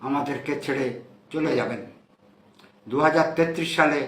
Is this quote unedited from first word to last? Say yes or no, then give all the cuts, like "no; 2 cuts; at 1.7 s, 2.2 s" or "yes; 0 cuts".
yes; 0 cuts